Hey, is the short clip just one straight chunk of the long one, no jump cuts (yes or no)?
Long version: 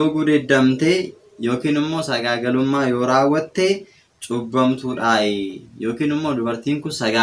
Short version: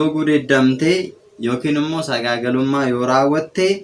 yes